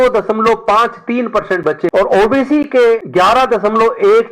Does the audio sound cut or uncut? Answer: cut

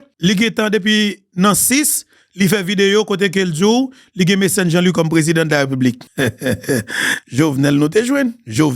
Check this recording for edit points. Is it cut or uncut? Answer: cut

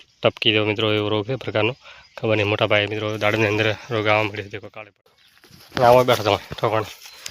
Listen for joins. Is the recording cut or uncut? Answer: cut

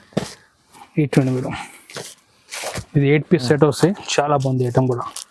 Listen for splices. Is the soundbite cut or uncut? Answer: uncut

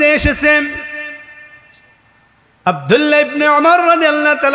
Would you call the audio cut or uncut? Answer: uncut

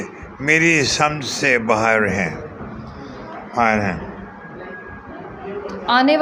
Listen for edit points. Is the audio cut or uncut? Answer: uncut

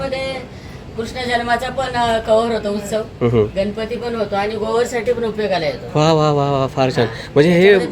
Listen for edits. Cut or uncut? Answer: uncut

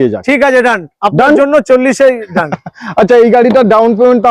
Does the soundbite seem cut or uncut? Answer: uncut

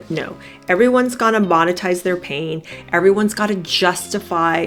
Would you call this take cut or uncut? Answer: uncut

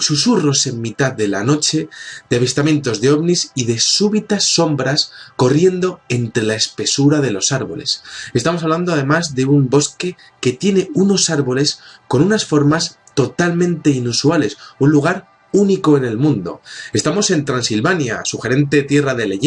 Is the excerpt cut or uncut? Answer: uncut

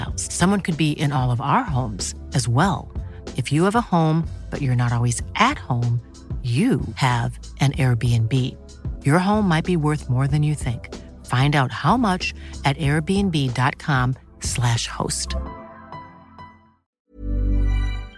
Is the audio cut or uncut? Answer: cut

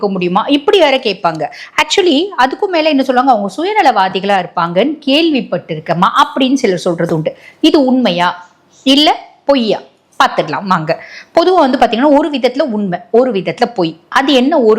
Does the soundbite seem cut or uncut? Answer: uncut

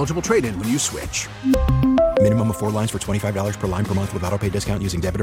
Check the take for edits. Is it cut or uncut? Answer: uncut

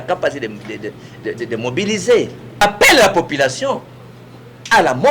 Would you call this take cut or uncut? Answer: cut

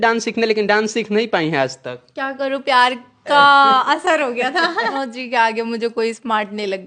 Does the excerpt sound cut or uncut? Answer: cut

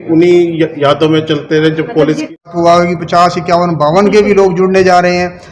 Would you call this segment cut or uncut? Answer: cut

